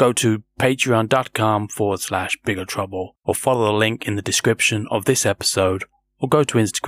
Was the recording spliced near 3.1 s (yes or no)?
yes